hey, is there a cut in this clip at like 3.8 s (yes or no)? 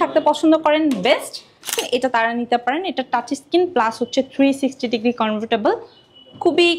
no